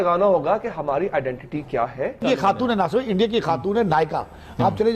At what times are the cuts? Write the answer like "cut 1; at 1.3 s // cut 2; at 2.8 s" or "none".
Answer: cut 1; at 2.2 s